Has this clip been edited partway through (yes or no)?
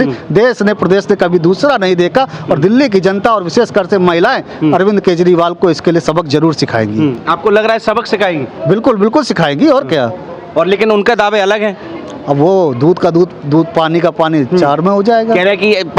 no